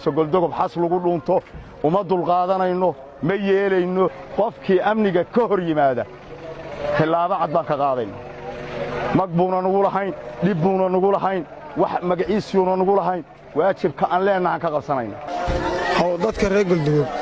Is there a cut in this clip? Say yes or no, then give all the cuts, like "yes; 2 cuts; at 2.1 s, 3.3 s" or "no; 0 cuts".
yes; 2 cuts; at 4.2 s, 15.2 s